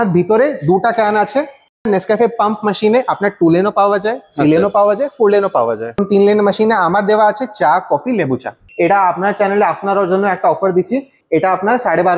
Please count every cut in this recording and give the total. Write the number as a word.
four